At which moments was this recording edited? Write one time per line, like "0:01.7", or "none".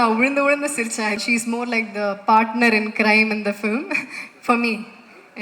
0:01.2